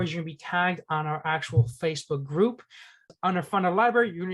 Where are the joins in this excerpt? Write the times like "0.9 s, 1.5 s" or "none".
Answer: 3.1 s